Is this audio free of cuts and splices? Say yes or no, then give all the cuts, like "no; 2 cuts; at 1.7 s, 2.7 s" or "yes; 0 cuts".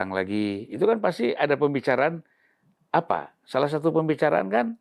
yes; 0 cuts